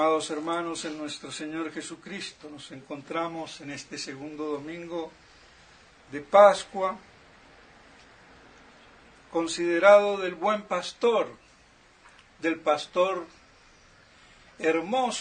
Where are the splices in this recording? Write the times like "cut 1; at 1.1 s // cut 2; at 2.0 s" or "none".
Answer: cut 1; at 1.5 s